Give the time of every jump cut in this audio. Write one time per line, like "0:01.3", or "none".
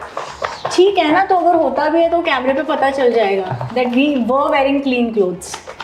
none